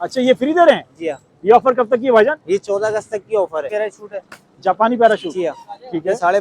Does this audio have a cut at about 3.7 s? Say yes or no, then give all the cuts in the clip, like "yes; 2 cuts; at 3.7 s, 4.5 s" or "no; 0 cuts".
yes; 1 cut; at 3.7 s